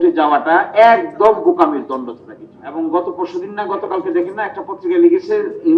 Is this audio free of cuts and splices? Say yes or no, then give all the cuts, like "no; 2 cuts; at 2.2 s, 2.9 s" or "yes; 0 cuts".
no; 1 cut; at 2.7 s